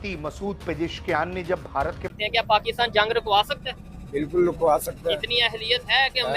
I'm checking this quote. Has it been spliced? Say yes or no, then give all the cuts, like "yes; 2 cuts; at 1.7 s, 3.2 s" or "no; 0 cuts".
yes; 1 cut; at 2.1 s